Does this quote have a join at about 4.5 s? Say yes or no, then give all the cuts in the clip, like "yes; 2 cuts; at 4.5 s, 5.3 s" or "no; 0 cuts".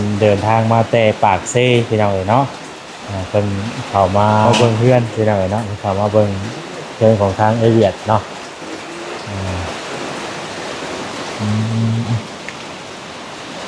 yes; 1 cut; at 4.5 s